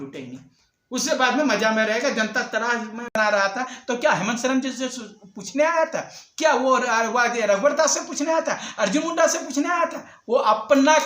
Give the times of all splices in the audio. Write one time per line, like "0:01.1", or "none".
0:03.2